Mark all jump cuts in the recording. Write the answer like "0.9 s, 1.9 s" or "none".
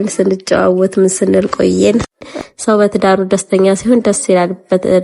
2.3 s

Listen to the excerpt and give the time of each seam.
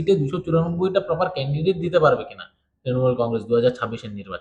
none

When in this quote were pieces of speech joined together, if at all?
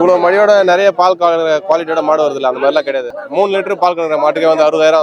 3.2 s

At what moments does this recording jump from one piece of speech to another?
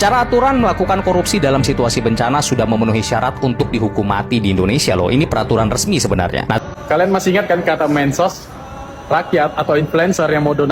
6.6 s

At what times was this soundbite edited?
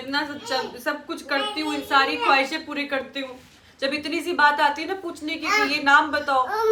none

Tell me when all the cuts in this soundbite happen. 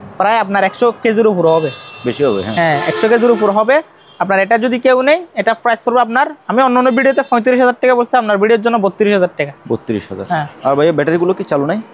none

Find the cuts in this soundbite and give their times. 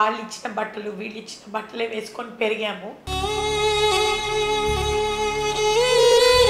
none

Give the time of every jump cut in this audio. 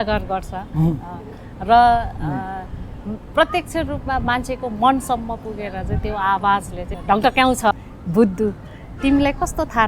6.8 s, 7.7 s

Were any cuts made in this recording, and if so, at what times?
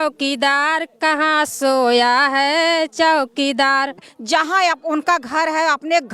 4.1 s

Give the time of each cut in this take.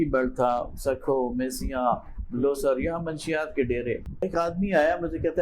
4.2 s

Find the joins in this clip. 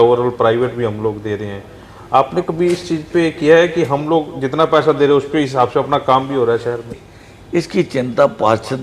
6.9 s

